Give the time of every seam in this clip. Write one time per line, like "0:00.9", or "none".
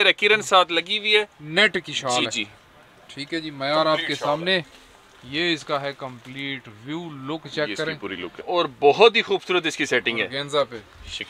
0:08.5